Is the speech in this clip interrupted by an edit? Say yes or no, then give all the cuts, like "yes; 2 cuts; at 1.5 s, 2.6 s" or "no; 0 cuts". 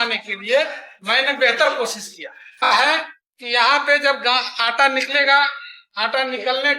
yes; 1 cut; at 2.7 s